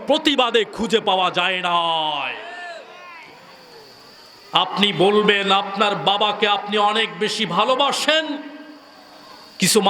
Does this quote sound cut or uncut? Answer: uncut